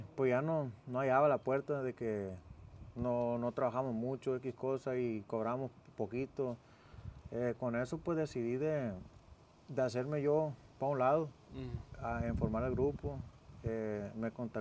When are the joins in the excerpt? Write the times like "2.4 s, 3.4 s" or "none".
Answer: none